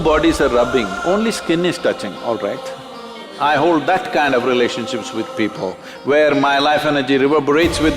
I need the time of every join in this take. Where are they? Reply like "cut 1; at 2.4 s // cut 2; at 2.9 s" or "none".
cut 1; at 3.3 s